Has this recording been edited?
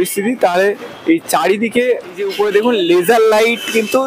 yes; 1 cut; at 2.3 s

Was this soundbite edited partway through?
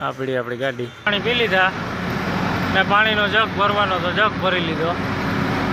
yes; 1 cut; at 1.1 s

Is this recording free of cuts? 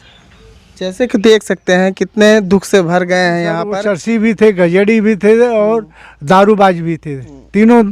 no; 1 cut; at 3.6 s

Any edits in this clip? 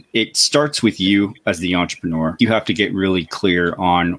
yes; 1 cut; at 2.4 s

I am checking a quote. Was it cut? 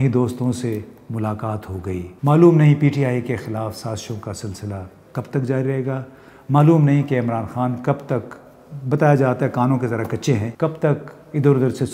yes; 2 cuts; at 2.1 s, 10.5 s

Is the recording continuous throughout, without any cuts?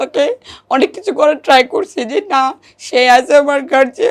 yes; 0 cuts

